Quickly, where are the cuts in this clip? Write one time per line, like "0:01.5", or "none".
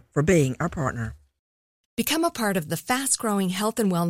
none